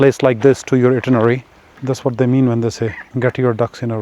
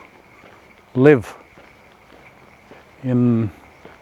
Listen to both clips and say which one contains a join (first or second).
first